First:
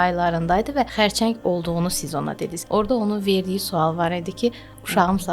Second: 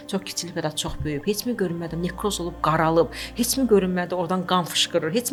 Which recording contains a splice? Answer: first; 2 cuts; at 0.9 s, 2.5 s

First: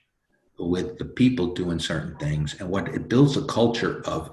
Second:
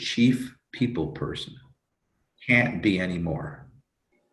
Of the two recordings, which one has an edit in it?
second; 1 cut; at 2.3 s

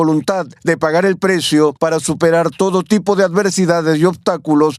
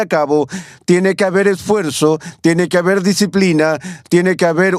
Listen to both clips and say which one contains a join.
first; 1 cut; at 1.8 s

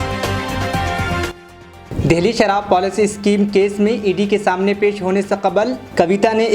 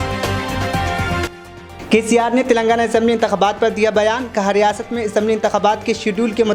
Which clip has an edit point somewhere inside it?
second; 1 cut; at 1.2 s

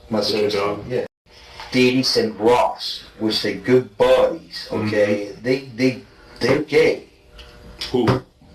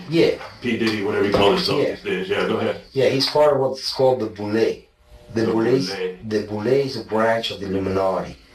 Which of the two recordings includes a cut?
first; 1 cut; at 1.1 s

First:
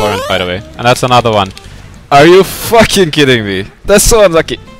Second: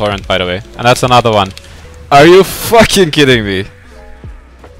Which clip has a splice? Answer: first; 1 cut; at 3.7 s

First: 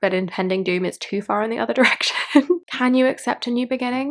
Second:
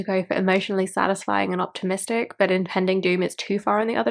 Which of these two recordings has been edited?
first; 1 cut; at 2.7 s

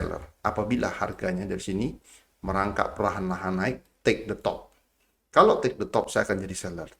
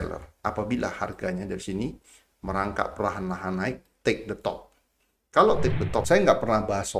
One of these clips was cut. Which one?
second; 1 cut; at 6.1 s

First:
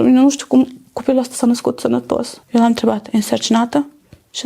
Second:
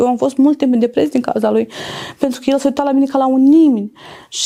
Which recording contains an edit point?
first; 1 cut; at 2.4 s

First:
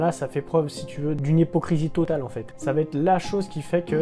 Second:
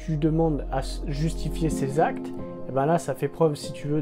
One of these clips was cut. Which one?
first; 1 cut; at 2.1 s

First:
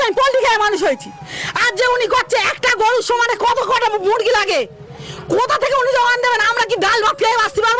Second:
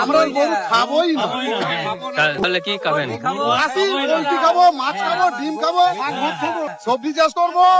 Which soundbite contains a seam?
second; 2 cuts; at 2.4 s, 6.8 s

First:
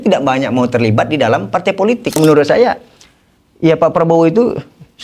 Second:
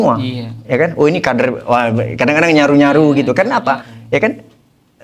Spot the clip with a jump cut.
first; 1 cut; at 2.2 s

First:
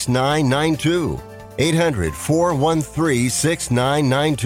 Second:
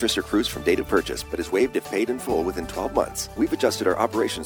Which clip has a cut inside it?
second; 1 cut; at 3.2 s

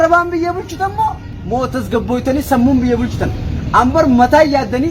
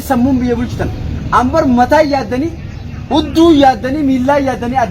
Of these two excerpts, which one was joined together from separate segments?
first; 1 cut; at 1.3 s

